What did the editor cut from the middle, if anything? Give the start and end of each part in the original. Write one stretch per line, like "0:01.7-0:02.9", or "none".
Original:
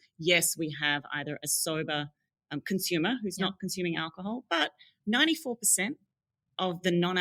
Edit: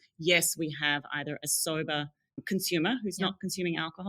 0:02.3-0:02.5